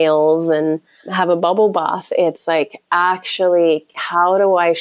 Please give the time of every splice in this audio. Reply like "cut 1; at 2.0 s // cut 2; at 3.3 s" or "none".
cut 1; at 1.1 s